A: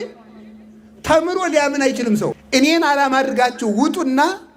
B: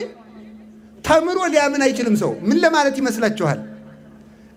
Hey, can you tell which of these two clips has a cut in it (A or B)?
A